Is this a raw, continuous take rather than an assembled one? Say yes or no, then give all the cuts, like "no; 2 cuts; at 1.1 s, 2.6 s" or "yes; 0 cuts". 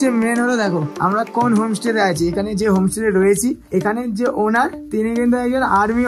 no; 3 cuts; at 0.9 s, 3.6 s, 4.8 s